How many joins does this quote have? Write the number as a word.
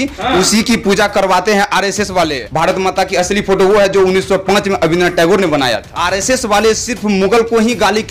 two